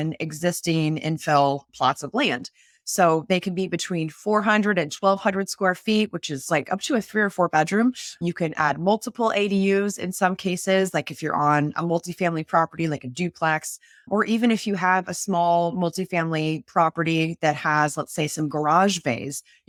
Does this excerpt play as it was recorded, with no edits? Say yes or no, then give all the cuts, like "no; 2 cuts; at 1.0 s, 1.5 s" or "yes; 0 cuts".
yes; 0 cuts